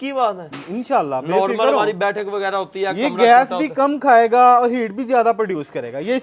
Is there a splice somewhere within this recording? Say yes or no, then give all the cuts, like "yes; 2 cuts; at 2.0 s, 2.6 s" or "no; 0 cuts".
no; 0 cuts